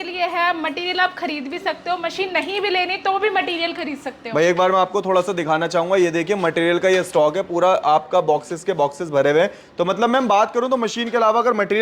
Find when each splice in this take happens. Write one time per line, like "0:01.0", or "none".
none